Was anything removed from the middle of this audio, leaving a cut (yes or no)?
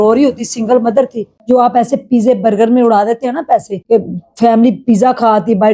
yes